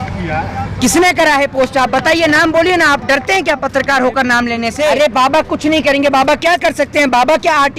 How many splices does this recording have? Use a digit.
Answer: 1